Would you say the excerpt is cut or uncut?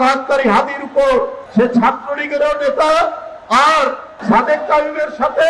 cut